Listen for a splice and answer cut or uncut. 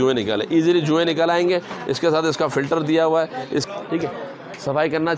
cut